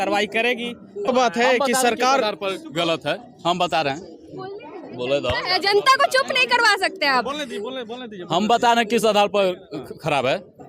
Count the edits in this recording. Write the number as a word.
one